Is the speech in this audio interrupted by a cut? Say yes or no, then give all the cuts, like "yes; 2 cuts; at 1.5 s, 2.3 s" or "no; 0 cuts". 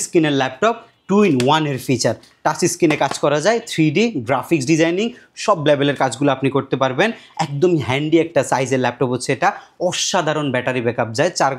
no; 0 cuts